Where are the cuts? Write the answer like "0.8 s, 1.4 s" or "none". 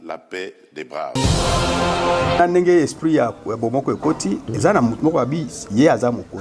1.2 s, 2.4 s